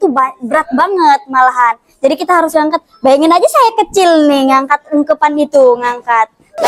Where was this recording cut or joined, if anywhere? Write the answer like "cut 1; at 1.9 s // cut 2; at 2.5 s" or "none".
none